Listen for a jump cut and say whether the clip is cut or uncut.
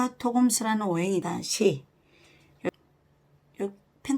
cut